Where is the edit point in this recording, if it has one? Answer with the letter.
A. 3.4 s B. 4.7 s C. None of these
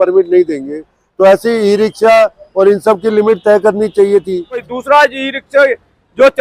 B